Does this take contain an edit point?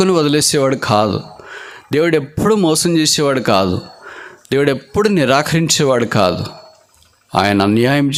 no; 0 cuts

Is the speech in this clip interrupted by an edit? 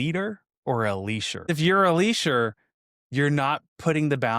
yes; 1 cut; at 1.5 s

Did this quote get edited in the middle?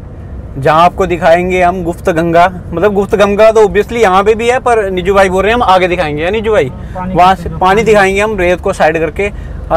no; 0 cuts

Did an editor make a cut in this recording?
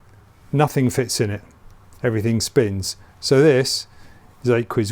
no; 0 cuts

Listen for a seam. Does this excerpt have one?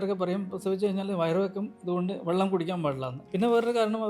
yes; 1 cut; at 3.2 s

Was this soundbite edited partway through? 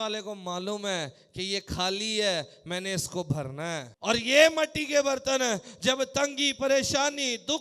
yes; 1 cut; at 3.9 s

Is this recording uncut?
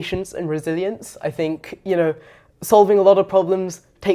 yes; 0 cuts

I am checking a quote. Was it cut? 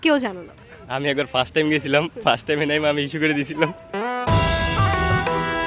no; 0 cuts

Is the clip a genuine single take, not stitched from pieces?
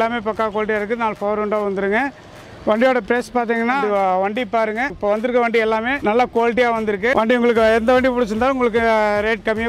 no; 4 cuts; at 3.8 s, 5.0 s, 5.9 s, 7.1 s

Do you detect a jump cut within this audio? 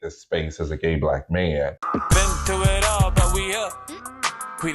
yes; 1 cut; at 1.8 s

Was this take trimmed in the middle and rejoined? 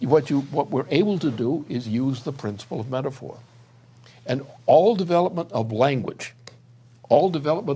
yes; 1 cut; at 5.0 s

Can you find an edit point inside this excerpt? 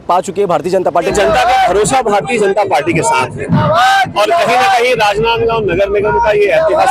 yes; 1 cut; at 1.1 s

